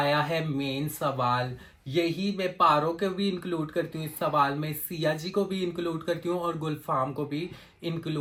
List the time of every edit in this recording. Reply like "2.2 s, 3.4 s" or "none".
none